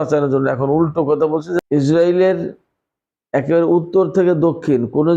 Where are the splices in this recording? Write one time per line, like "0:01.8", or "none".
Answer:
0:01.6